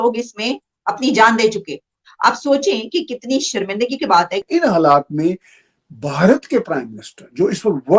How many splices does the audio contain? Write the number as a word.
one